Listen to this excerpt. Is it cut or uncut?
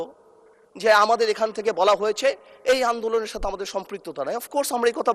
uncut